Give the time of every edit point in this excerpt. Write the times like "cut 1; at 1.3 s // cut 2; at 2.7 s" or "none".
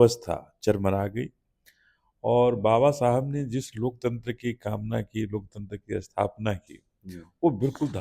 none